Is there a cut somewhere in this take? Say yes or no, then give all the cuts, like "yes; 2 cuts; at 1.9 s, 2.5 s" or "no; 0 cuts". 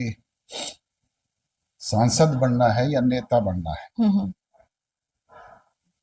no; 0 cuts